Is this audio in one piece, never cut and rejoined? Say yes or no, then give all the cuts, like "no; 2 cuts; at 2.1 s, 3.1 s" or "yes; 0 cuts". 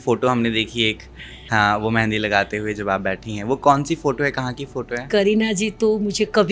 yes; 0 cuts